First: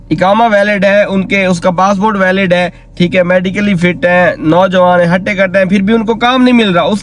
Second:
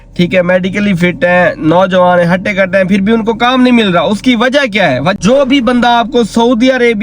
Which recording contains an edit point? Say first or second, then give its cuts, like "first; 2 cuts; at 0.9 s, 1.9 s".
second; 1 cut; at 5.2 s